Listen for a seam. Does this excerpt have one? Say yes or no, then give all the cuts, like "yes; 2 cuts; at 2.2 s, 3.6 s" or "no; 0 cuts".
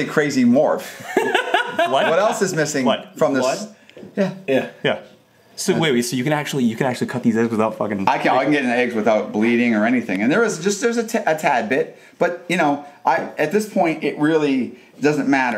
no; 0 cuts